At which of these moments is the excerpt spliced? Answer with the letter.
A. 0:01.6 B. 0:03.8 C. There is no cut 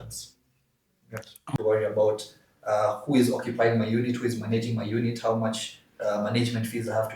A